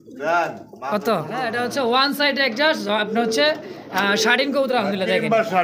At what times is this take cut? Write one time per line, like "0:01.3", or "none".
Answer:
0:01.4